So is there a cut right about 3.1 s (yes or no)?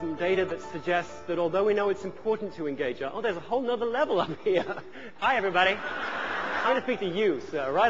no